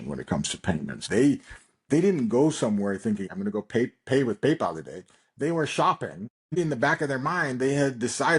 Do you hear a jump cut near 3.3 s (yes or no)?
yes